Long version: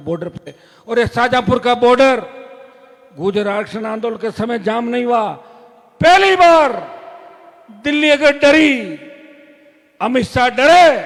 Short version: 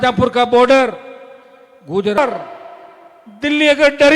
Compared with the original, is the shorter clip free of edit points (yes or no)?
no